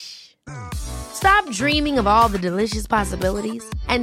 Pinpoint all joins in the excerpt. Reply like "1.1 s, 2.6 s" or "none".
none